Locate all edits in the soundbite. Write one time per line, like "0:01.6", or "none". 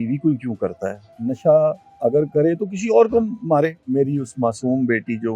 0:01.1
0:03.8